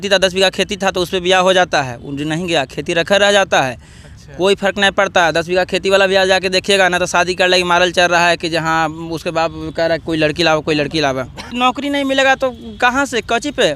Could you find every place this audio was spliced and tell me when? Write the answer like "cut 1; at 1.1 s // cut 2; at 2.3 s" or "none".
cut 1; at 11.4 s